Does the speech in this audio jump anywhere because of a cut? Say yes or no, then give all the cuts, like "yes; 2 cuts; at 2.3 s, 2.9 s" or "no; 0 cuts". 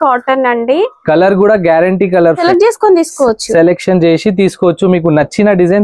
yes; 1 cut; at 2.4 s